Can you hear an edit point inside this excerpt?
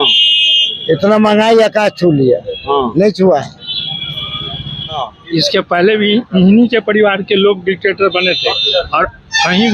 yes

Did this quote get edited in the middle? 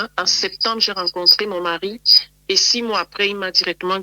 no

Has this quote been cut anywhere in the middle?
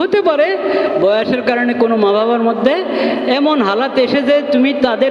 no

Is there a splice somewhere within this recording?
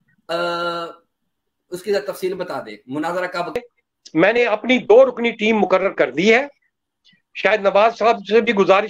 yes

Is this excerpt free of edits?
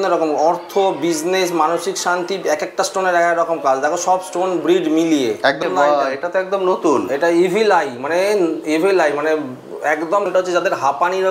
no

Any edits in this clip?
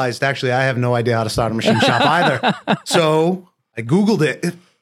no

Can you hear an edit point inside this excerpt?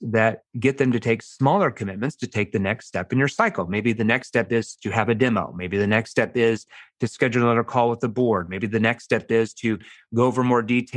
no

